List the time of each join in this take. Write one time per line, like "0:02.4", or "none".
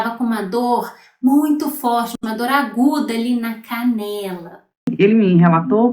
0:04.9